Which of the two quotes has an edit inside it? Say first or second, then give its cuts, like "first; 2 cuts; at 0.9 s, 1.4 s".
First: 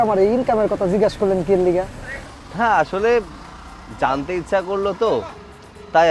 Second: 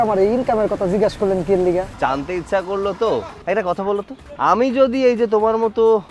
second; 3 cuts; at 1.9 s, 3.3 s, 4.2 s